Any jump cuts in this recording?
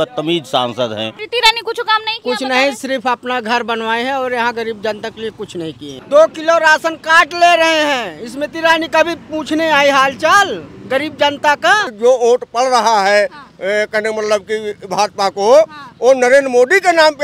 yes; 3 cuts; at 1.2 s, 5.9 s, 11.9 s

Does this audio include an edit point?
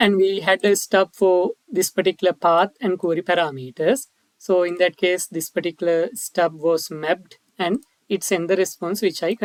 no; 0 cuts

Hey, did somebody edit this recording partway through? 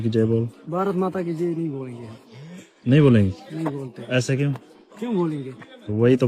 no; 0 cuts

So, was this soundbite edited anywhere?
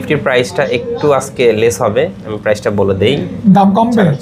no; 0 cuts

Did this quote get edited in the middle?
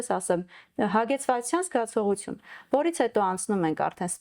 no; 0 cuts

